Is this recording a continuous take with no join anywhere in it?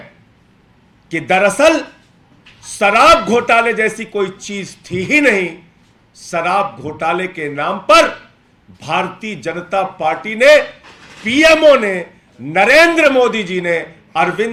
yes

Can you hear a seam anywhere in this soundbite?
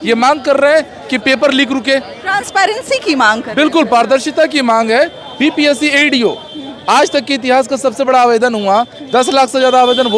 no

